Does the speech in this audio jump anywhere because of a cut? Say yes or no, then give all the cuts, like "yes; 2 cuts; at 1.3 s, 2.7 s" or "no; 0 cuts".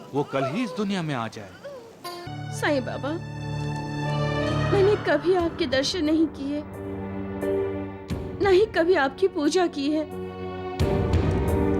yes; 2 cuts; at 2.3 s, 4.6 s